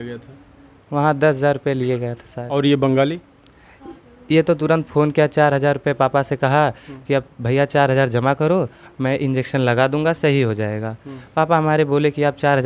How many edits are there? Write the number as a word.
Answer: zero